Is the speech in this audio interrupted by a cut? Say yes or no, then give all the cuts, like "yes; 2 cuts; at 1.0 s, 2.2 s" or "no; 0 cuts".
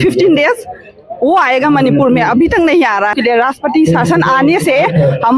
yes; 1 cut; at 3.2 s